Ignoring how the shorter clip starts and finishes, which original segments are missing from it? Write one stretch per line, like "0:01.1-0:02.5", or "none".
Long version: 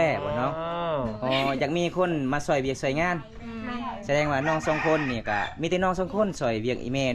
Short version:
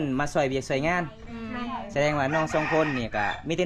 none